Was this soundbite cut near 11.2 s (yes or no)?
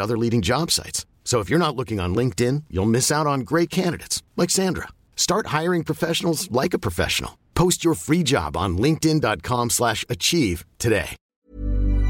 yes